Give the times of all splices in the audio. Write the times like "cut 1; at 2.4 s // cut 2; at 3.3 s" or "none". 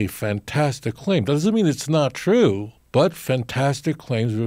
cut 1; at 2.7 s